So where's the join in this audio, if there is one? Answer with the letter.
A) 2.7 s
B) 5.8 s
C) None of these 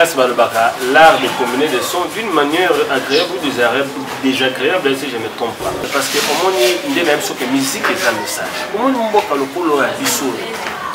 B